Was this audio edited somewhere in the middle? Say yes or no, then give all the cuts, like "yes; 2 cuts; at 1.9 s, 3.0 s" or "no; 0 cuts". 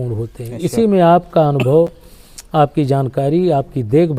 no; 0 cuts